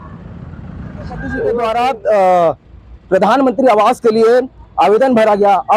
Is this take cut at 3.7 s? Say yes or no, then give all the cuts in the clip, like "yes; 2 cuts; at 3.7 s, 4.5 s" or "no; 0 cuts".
no; 1 cut; at 1.6 s